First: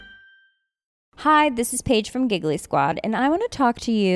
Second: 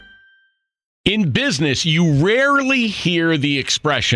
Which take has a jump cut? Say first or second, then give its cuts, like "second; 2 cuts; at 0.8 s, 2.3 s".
second; 1 cut; at 1.0 s